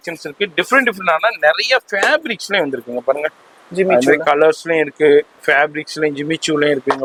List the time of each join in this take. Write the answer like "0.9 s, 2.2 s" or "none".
none